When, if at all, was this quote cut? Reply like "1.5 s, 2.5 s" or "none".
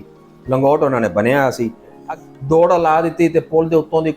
2.0 s